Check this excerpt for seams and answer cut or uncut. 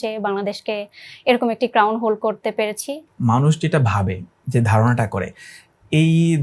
cut